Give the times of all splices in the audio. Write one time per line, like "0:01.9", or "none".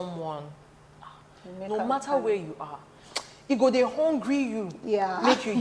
none